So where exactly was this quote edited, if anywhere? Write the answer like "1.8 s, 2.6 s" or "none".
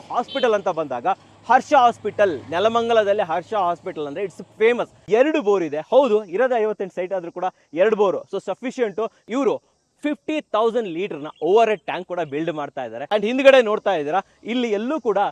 5.0 s, 9.2 s, 13.0 s